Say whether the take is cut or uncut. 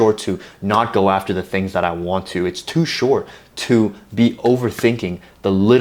uncut